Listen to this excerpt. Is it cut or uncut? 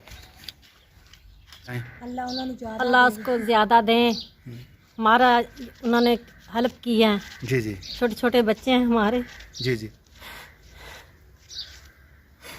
cut